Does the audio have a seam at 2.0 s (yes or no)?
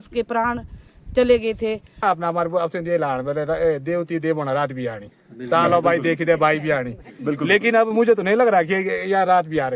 yes